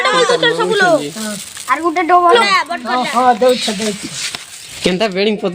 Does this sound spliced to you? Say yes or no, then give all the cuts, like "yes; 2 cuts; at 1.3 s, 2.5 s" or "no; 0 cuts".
yes; 2 cuts; at 2.3 s, 4.7 s